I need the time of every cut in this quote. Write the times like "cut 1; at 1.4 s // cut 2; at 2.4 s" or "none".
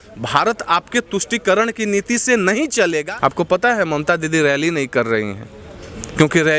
cut 1; at 3.1 s